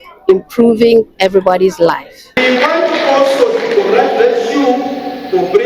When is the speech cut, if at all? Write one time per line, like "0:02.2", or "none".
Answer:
0:02.4